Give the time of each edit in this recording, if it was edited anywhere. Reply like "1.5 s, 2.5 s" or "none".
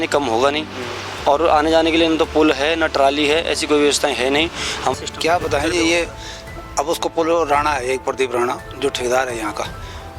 4.9 s